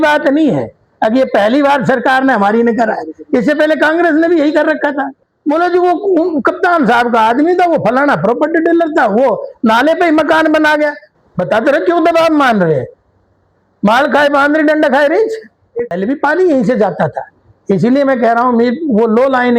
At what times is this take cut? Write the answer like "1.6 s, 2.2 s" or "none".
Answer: 5.2 s, 11.1 s, 15.9 s

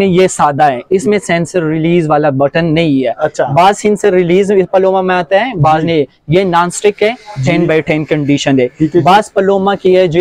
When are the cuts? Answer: none

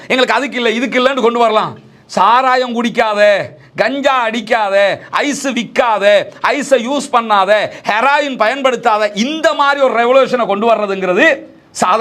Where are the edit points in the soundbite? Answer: none

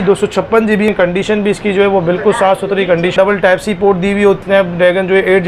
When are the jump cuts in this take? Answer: 0.9 s, 3.2 s, 4.4 s

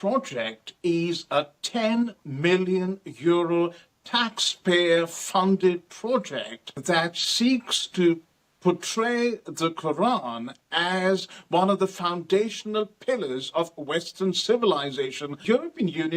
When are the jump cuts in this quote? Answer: 6.7 s, 15.4 s

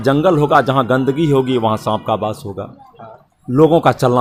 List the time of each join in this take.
none

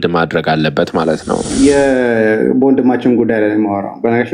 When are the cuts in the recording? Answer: 1.5 s

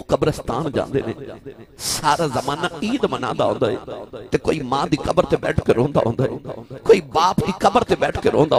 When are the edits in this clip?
none

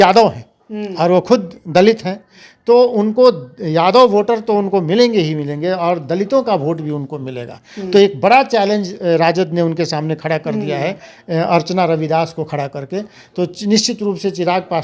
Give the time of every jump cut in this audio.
none

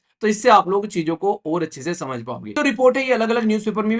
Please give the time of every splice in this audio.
2.6 s

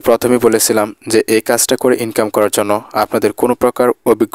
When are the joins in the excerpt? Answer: none

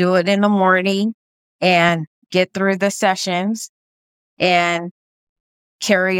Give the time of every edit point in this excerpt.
none

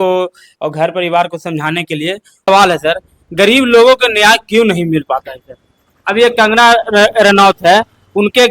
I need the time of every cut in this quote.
2.5 s

